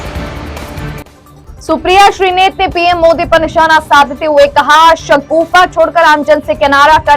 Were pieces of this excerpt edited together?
yes; 1 cut; at 1.2 s

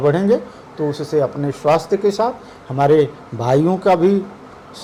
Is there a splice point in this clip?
no; 0 cuts

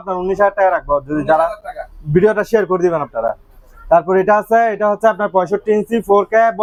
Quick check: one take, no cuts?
yes; 0 cuts

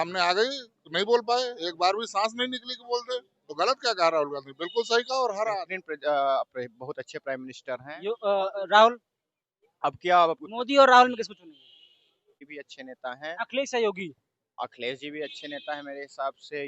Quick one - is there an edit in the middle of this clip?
yes; 2 cuts; at 5.7 s, 12.4 s

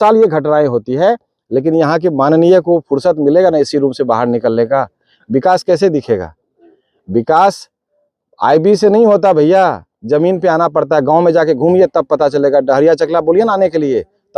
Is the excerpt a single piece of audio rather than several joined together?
yes; 0 cuts

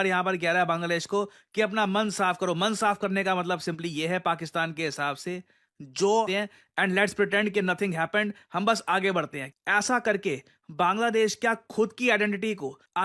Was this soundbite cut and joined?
yes; 1 cut; at 6.3 s

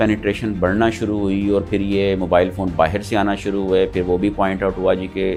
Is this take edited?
no; 0 cuts

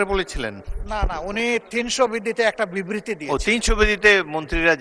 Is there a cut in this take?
no; 0 cuts

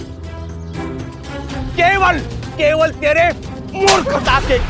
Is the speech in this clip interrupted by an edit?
yes; 1 cut; at 1.7 s

